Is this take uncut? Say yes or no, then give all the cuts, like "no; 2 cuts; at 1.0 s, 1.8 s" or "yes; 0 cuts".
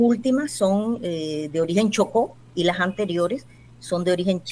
yes; 0 cuts